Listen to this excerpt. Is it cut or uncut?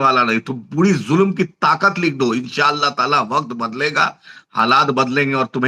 uncut